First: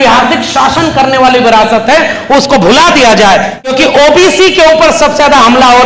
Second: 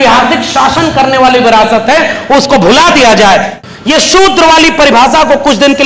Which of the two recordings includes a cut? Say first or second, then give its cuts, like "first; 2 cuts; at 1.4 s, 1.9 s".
first; 1 cut; at 3.6 s